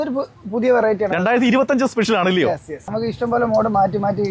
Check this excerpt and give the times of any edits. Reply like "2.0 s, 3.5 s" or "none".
none